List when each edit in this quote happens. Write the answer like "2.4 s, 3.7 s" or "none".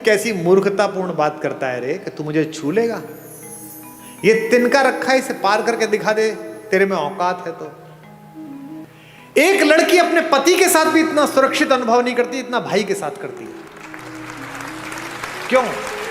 8.8 s